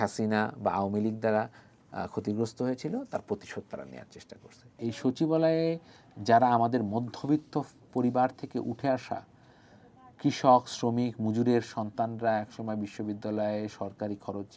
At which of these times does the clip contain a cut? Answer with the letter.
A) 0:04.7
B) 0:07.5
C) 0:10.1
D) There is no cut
A